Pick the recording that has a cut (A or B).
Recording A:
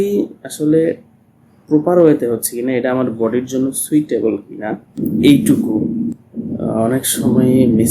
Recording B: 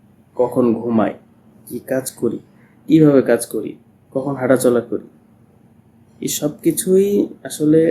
A